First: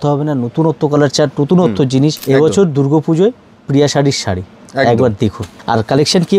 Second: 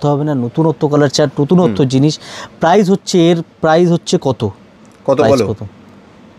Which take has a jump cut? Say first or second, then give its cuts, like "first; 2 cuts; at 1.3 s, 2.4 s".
first; 2 cuts; at 2.2 s, 5.5 s